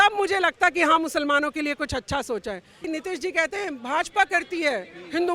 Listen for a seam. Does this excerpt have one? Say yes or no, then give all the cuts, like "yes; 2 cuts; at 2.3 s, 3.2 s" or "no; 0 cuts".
yes; 1 cut; at 2.8 s